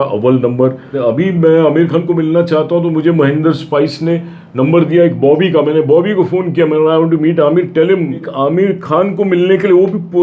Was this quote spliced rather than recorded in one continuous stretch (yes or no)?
yes